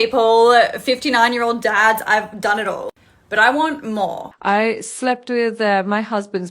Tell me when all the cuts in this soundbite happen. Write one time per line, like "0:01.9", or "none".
0:04.3